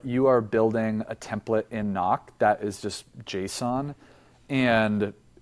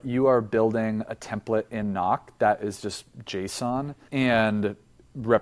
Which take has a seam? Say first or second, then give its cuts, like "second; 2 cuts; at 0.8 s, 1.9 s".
second; 1 cut; at 4.0 s